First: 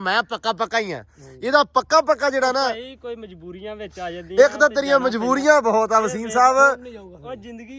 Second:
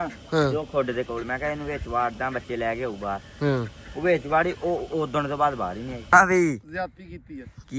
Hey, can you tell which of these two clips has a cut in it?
second; 1 cut; at 6.1 s

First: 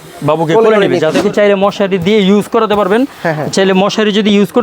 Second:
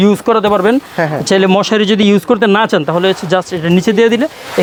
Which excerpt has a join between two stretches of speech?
first; 1 cut; at 1.2 s

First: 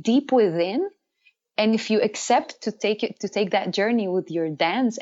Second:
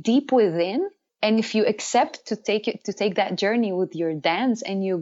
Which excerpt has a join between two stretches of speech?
second; 1 cut; at 1.0 s

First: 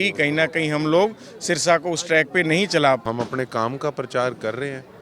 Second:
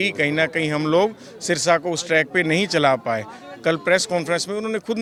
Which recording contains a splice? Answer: first; 1 cut; at 3.0 s

